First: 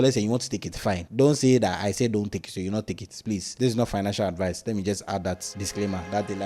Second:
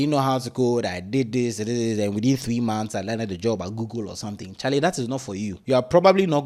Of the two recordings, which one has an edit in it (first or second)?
first